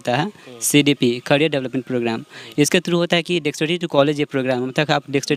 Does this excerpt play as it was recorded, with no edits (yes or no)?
yes